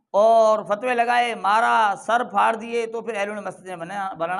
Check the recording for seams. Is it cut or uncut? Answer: uncut